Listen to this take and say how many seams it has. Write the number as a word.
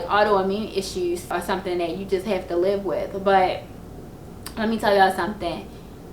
one